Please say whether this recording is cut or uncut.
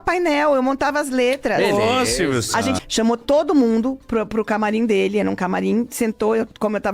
cut